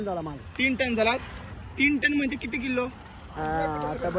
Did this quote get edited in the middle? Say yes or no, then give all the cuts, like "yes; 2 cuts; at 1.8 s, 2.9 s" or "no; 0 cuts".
no; 0 cuts